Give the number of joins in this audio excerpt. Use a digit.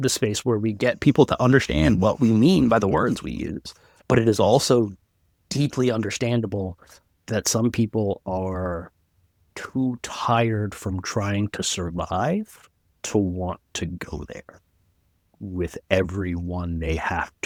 0